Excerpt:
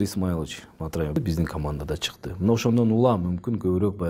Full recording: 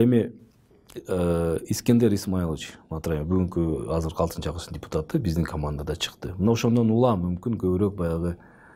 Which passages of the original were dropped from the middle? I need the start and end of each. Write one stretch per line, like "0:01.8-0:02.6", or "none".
0:03.2-0:05.1